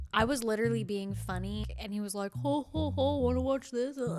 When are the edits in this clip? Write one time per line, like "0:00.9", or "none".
0:01.7